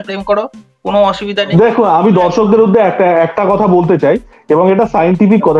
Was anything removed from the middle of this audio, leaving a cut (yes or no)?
yes